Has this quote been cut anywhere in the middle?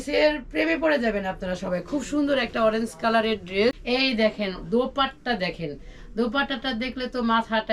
yes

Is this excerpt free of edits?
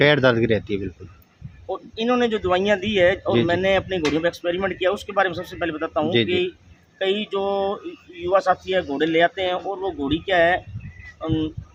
yes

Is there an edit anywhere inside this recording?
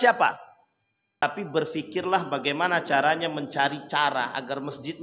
yes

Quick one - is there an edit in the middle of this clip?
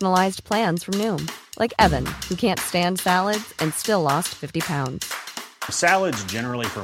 no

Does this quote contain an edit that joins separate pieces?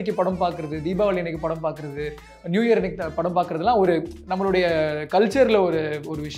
no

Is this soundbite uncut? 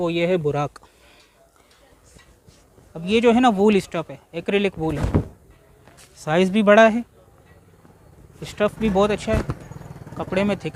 yes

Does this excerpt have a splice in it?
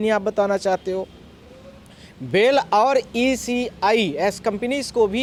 no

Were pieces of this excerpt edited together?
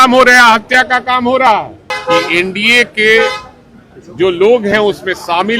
yes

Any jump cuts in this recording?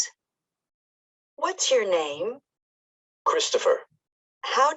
no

